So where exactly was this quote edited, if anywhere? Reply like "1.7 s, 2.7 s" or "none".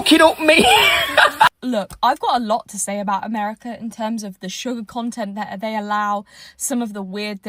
1.5 s